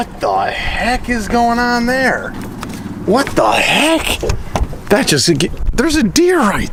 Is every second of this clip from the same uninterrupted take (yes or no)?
yes